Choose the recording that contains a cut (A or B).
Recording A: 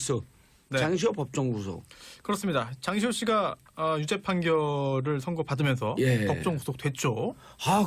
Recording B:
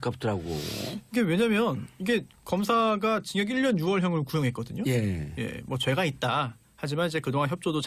A